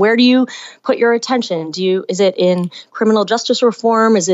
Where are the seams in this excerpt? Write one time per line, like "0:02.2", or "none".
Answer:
none